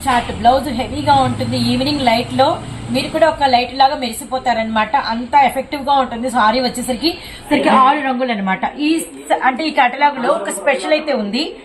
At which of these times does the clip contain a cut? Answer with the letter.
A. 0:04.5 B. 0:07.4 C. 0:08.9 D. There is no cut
B